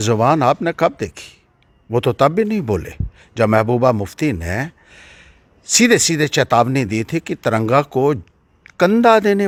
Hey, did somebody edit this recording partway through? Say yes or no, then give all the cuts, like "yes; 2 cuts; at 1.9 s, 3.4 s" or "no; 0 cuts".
no; 0 cuts